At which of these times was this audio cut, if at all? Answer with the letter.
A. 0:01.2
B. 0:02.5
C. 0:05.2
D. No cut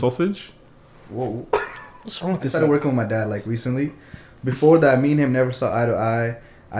B